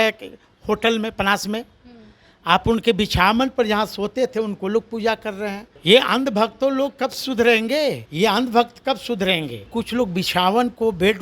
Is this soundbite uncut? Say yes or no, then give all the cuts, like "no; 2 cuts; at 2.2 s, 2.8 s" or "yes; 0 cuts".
no; 3 cuts; at 5.7 s, 8.1 s, 9.7 s